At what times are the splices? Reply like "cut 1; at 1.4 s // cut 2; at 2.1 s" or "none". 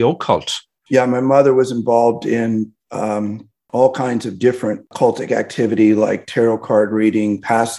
cut 1; at 4.9 s